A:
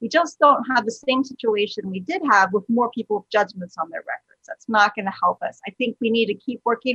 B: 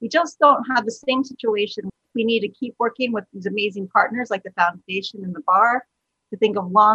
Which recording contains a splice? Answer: B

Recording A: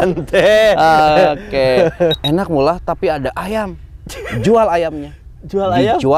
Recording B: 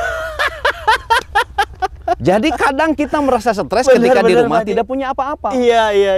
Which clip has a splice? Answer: A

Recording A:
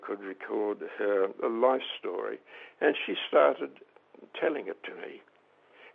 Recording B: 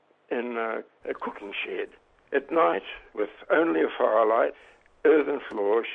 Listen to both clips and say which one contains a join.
B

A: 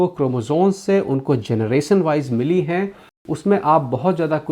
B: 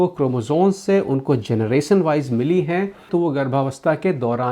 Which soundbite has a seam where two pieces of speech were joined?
A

